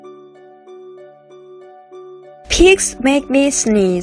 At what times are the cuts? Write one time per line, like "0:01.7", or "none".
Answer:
0:02.5